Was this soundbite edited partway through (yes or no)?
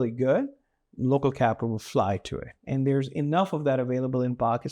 no